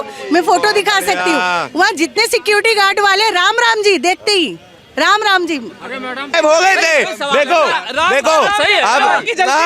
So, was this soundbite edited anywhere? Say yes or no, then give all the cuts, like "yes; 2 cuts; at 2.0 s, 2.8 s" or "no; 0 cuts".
yes; 1 cut; at 6.3 s